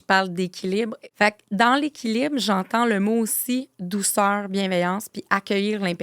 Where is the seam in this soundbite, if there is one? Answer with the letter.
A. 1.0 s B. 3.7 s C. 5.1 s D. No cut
A